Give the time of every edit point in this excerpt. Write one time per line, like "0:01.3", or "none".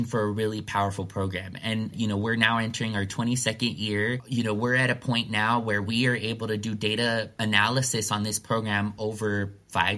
0:01.9